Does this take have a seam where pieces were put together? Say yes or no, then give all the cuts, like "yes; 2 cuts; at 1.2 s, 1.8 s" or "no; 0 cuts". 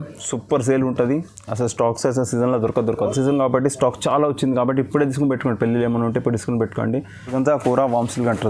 yes; 2 cuts; at 3.1 s, 7.3 s